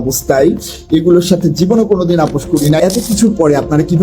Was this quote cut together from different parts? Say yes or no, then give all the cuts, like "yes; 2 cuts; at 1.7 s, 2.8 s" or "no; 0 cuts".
yes; 1 cut; at 2.8 s